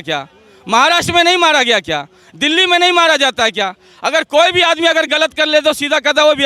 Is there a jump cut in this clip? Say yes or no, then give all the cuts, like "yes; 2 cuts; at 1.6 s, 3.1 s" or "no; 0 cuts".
no; 0 cuts